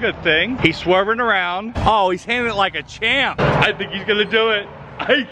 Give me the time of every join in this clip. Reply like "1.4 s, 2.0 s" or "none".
1.7 s, 3.4 s